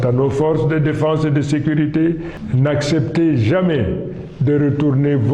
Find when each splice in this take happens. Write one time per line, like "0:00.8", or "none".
0:02.3